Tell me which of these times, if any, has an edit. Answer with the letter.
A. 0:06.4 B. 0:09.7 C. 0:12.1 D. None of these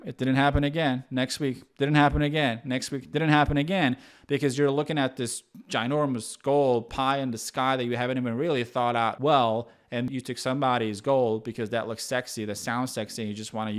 D